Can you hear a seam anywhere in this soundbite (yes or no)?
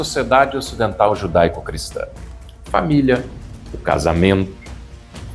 no